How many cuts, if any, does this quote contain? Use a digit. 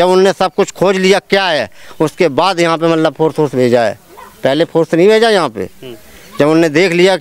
0